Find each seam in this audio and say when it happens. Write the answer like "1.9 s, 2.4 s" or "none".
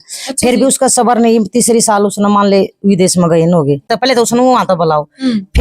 3.9 s